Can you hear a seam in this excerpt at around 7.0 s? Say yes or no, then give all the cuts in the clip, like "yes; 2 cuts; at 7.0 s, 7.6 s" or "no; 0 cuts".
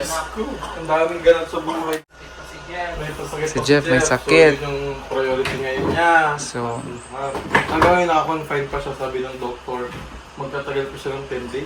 no; 1 cut; at 2.0 s